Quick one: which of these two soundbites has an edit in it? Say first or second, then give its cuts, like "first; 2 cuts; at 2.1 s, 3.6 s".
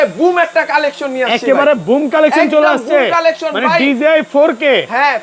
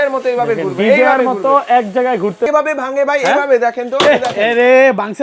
second; 1 cut; at 2.5 s